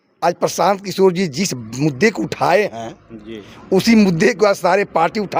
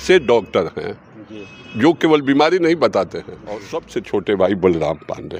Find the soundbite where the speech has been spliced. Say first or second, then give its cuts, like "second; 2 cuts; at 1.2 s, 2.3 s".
second; 1 cut; at 3.7 s